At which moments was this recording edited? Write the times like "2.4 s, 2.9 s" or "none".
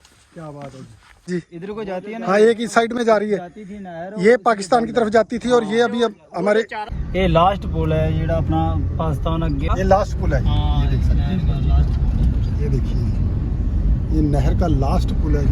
1.3 s, 7.0 s, 9.7 s